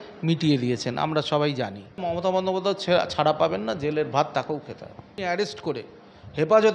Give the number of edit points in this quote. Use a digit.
2